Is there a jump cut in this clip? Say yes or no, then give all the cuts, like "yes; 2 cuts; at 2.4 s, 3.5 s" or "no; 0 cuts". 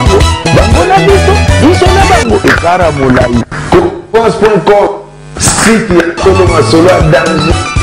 no; 0 cuts